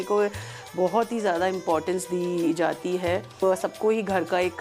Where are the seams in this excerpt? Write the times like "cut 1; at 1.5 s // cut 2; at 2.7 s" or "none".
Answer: cut 1; at 3.4 s